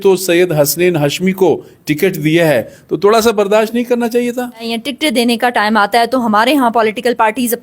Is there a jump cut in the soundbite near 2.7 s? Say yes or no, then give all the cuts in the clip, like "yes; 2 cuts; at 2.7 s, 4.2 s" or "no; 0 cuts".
no; 1 cut; at 4.7 s